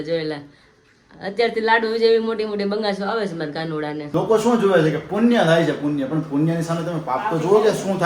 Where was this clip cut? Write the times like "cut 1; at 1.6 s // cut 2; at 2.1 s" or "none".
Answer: cut 1; at 4.1 s